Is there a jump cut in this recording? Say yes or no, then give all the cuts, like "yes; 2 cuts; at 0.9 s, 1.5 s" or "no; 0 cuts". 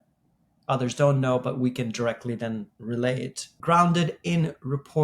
yes; 1 cut; at 3.3 s